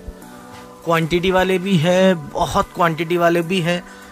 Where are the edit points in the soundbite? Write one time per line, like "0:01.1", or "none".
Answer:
none